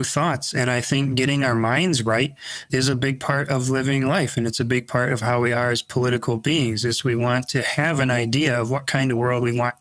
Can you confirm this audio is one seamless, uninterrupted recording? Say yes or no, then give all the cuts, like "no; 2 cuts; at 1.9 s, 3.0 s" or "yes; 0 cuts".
yes; 0 cuts